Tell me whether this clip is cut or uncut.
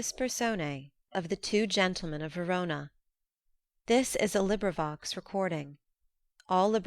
cut